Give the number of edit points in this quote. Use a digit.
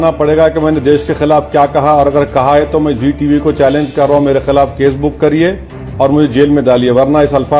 0